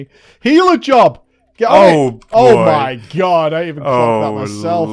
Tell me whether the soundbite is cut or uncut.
uncut